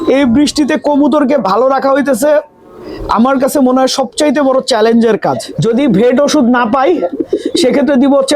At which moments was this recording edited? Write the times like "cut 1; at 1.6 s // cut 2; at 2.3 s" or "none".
cut 1; at 5.5 s